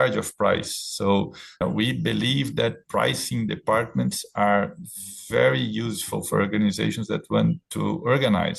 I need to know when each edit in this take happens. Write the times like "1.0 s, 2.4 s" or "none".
1.6 s